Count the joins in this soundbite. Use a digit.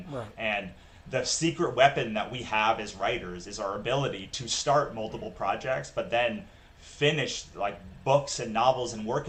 0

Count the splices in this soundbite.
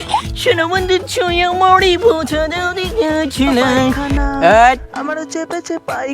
1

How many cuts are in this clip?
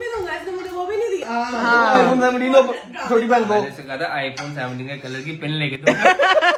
0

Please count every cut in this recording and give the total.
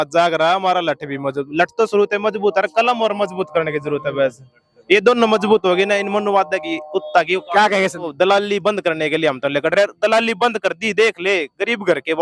1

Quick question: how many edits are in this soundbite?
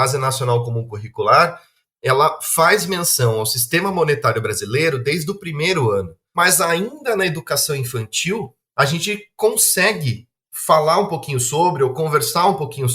1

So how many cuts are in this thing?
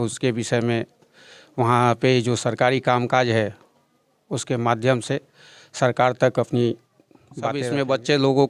1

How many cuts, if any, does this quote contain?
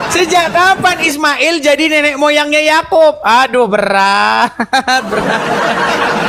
0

